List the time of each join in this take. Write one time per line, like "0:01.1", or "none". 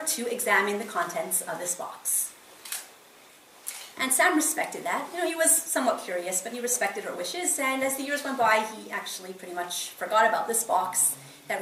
none